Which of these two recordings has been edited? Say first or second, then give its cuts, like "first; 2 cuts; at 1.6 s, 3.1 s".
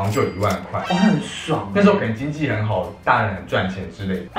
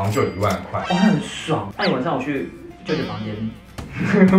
second; 1 cut; at 1.7 s